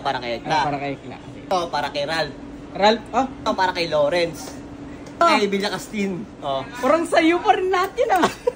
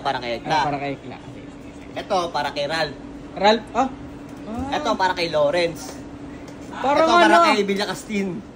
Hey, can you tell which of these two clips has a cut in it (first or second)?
first